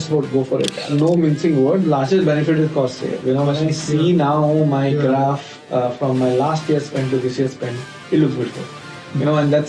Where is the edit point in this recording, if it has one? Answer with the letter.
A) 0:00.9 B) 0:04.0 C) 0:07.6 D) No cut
A